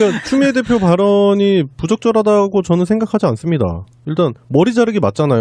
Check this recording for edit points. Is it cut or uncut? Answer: uncut